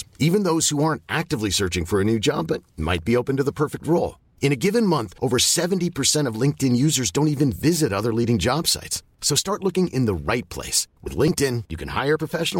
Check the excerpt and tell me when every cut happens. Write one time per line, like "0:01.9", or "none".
none